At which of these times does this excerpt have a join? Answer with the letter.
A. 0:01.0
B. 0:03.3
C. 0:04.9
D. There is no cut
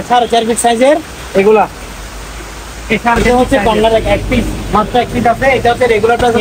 B